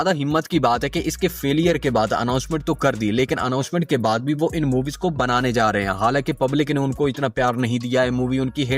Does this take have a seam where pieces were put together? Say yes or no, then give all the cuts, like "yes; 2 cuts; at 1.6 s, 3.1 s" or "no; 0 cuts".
no; 0 cuts